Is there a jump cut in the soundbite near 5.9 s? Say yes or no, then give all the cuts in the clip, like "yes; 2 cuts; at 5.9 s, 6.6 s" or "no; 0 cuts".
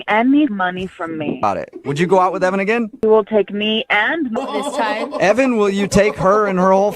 no; 3 cuts; at 1.4 s, 3.0 s, 4.3 s